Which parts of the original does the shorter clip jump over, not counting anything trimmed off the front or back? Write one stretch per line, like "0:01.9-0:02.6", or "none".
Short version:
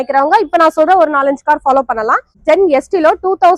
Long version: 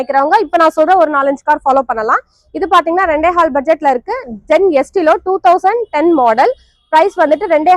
0:02.3-0:04.3